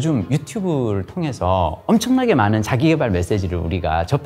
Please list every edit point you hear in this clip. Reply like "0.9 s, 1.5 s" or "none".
none